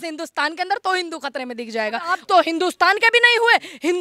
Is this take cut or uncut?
cut